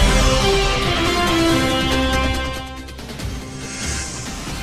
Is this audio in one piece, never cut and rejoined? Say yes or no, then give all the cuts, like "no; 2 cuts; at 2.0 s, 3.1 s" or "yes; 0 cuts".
no; 1 cut; at 3.6 s